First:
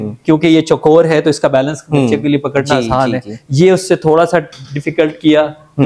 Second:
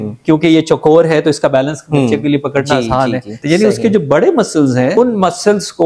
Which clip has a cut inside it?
second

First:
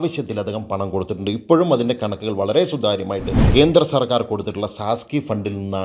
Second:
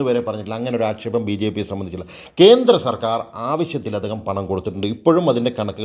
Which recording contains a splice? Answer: first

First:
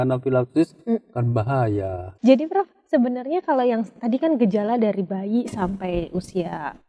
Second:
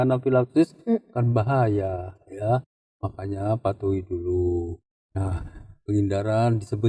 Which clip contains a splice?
first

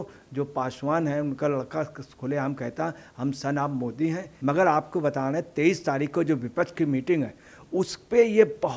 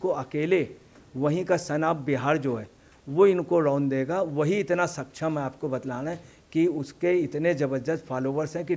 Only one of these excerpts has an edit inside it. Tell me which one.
first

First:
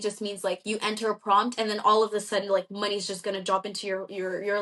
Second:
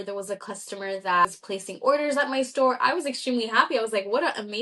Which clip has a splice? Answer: second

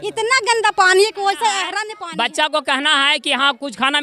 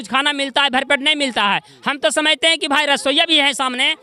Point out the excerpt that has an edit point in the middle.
first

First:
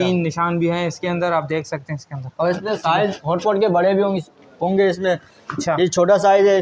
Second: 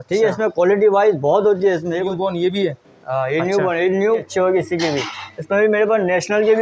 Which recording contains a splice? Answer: second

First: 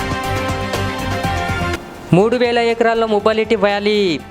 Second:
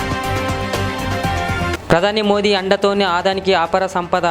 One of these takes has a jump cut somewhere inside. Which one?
first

